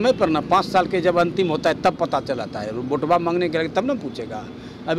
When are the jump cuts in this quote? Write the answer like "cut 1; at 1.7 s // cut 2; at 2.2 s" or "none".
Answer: none